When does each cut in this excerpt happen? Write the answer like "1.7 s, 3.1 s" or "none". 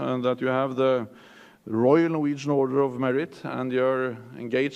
1.1 s